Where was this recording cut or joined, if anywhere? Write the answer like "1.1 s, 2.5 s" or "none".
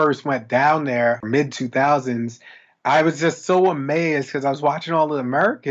1.2 s